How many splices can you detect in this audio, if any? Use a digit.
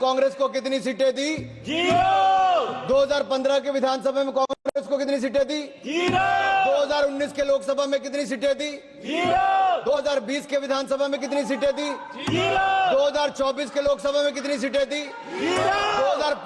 0